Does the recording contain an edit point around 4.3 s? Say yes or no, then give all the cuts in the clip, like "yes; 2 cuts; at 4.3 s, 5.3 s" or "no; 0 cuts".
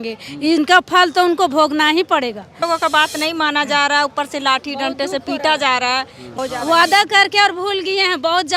no; 2 cuts; at 2.6 s, 6.4 s